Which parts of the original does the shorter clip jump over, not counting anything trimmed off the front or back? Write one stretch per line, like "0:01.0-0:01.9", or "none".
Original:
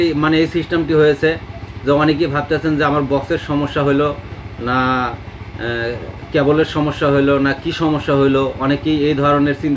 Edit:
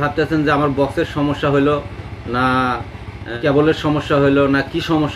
0:05.6-0:06.1